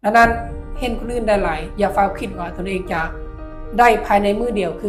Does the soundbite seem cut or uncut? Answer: uncut